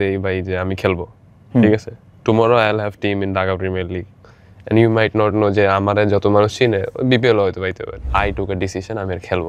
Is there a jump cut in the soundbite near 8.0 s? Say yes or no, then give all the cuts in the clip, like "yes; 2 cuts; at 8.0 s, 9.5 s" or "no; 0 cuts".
yes; 1 cut; at 8.0 s